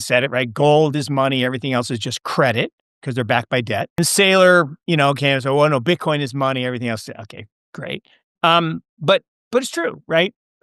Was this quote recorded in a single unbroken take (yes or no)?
no